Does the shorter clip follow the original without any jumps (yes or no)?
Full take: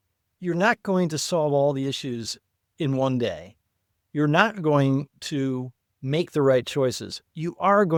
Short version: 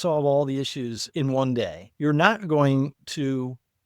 no